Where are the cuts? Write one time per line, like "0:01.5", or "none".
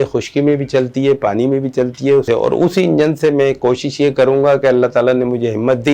0:02.2